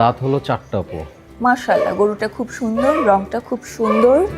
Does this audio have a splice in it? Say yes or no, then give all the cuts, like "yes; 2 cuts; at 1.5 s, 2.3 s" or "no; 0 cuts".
yes; 1 cut; at 1.2 s